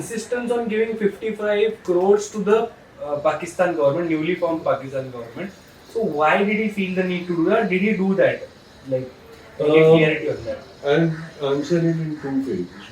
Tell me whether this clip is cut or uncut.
uncut